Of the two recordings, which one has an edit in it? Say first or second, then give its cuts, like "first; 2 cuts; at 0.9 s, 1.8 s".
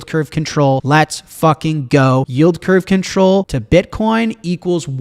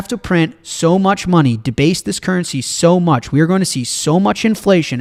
first; 3 cuts; at 0.8 s, 2.3 s, 3.6 s